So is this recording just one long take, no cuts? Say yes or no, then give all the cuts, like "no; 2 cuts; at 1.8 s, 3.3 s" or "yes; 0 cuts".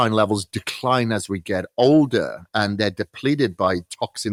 yes; 0 cuts